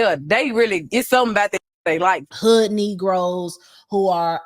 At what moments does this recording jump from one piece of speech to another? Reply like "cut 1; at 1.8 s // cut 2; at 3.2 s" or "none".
cut 1; at 2.3 s